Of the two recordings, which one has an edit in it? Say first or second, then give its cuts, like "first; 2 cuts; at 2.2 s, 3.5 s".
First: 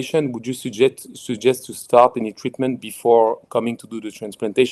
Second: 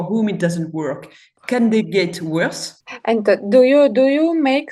second; 1 cut; at 2.6 s